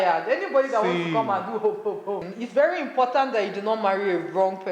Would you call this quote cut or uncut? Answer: cut